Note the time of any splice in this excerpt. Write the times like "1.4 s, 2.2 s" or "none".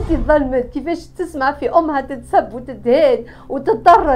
none